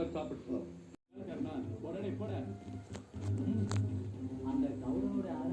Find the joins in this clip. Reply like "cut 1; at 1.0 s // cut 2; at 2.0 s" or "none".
cut 1; at 1.1 s